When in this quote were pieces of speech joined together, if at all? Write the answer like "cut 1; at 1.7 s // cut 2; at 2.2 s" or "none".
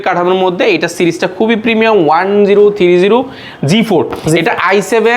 none